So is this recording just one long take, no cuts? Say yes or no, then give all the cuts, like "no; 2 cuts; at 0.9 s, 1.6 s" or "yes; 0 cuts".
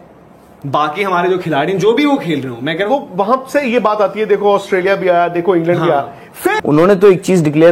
no; 2 cuts; at 2.9 s, 6.6 s